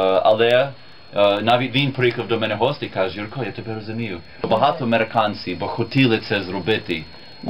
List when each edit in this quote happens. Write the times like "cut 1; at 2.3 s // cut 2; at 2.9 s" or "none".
cut 1; at 4.5 s